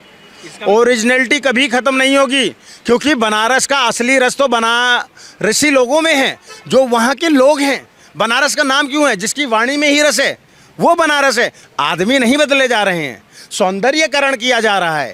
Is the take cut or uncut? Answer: uncut